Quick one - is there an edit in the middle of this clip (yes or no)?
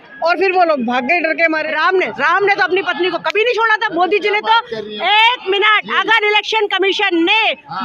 yes